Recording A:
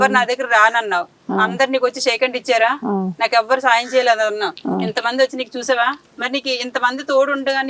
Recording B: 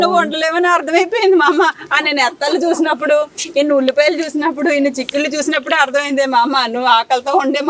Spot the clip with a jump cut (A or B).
A